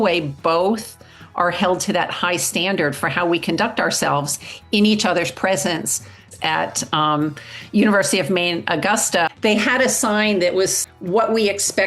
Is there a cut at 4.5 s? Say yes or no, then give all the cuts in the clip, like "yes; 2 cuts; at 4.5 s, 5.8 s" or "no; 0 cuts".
no; 3 cuts; at 6.3 s, 9.3 s, 10.9 s